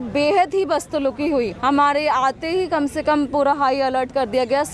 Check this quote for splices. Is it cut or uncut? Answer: cut